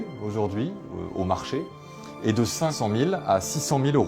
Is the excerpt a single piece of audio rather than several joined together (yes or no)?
no